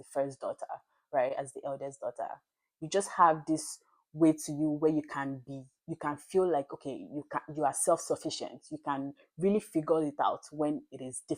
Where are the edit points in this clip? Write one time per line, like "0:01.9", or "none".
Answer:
none